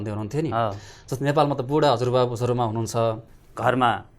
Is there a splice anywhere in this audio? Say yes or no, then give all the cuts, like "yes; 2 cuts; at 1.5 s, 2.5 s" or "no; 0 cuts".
yes; 1 cut; at 3.3 s